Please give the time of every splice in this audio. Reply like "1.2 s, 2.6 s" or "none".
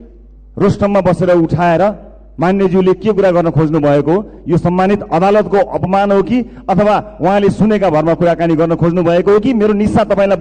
none